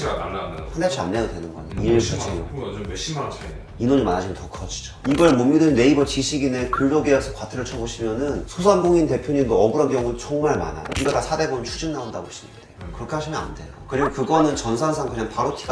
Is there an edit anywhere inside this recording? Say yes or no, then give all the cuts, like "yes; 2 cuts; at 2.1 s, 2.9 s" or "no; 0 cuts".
yes; 2 cuts; at 4.8 s, 10.8 s